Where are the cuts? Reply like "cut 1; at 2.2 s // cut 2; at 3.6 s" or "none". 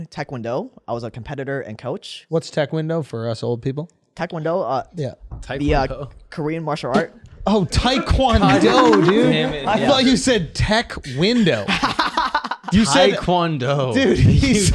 cut 1; at 2.2 s